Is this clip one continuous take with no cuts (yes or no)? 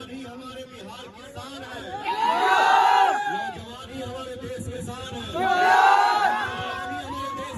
yes